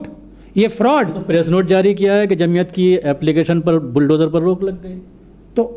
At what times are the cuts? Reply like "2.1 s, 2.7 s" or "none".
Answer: none